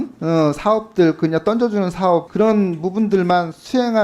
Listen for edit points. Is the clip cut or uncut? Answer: cut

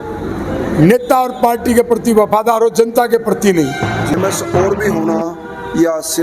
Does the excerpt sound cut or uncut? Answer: cut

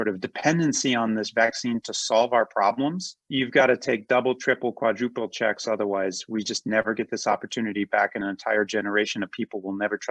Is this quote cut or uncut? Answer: uncut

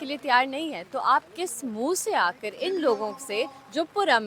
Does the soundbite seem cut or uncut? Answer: uncut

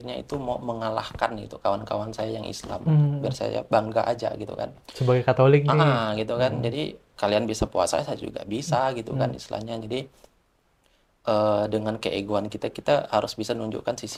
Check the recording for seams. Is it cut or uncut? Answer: uncut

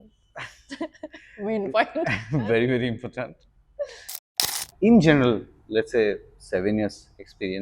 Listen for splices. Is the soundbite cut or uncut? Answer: cut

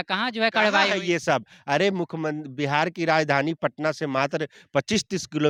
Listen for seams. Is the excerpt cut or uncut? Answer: uncut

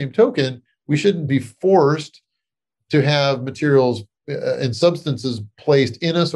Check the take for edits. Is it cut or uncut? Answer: uncut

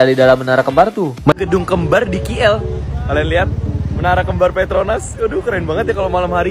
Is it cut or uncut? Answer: cut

